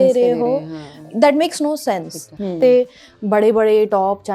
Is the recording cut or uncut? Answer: cut